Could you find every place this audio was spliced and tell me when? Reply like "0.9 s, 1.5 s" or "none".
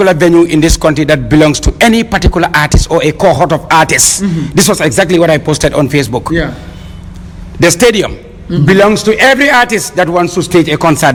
none